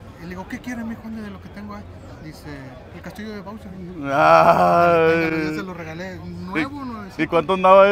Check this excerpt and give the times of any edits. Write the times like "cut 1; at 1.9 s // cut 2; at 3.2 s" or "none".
none